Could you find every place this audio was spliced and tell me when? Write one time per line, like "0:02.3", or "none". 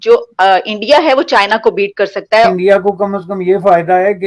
0:02.5